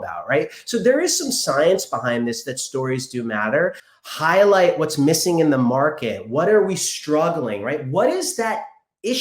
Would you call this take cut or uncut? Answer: cut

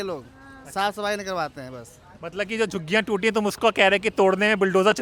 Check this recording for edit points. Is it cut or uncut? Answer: uncut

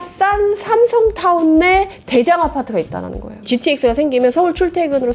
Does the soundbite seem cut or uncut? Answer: cut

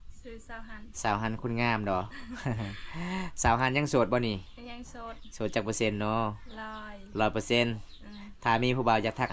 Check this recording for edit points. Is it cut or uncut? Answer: uncut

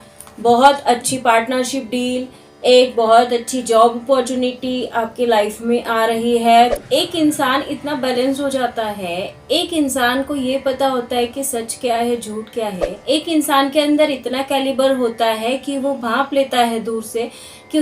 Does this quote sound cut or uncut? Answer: cut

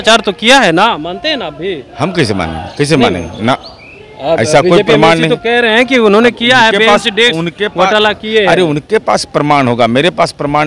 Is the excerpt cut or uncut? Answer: uncut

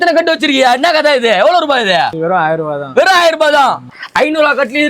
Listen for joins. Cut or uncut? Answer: cut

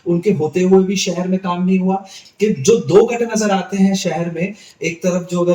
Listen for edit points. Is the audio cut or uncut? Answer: cut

